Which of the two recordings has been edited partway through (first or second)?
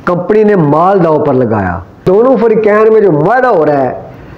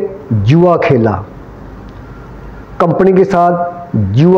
first